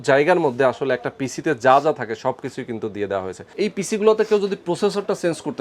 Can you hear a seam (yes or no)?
yes